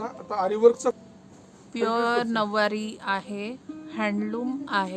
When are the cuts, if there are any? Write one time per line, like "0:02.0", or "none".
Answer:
0:01.0